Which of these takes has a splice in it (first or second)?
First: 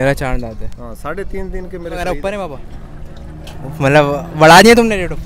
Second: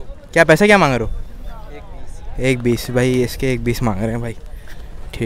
first